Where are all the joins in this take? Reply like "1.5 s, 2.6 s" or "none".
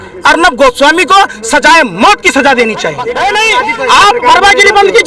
3.0 s